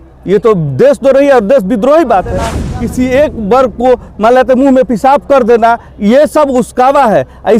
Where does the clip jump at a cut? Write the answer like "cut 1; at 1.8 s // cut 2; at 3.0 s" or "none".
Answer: cut 1; at 2.7 s